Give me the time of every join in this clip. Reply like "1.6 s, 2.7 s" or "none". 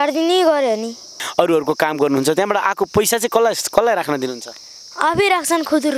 1.2 s